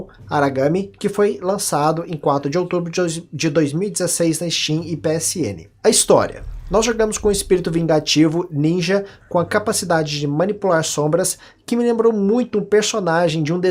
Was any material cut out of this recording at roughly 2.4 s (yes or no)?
no